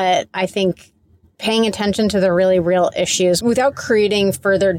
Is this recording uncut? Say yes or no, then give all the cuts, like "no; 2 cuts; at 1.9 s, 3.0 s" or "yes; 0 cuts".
no; 1 cut; at 3.4 s